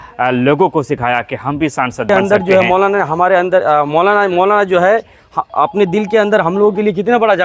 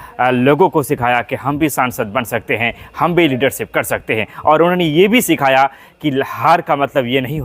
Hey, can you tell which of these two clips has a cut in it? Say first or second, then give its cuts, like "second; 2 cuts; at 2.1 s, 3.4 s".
first; 1 cut; at 2.1 s